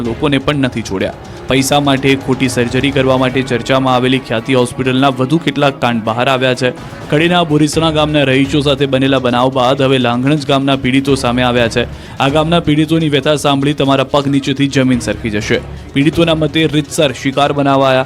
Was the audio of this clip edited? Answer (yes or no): yes